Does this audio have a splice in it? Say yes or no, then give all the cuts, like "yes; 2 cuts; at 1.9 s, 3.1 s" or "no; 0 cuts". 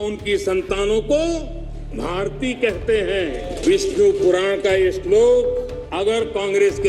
yes; 2 cuts; at 3.6 s, 5.8 s